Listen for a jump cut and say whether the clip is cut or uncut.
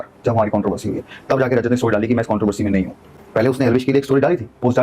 uncut